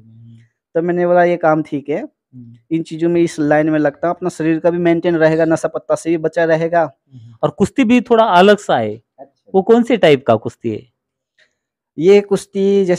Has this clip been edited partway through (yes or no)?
yes